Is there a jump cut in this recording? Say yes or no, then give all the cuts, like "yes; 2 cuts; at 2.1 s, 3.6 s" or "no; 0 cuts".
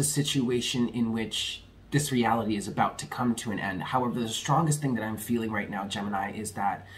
no; 0 cuts